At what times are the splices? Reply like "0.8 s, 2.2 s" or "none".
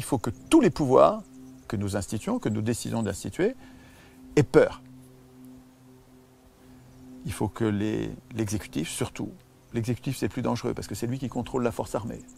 none